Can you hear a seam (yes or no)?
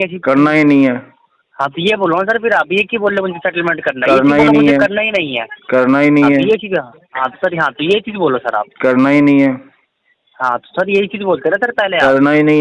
no